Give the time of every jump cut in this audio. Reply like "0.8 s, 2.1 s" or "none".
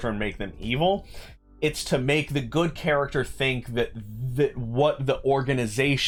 none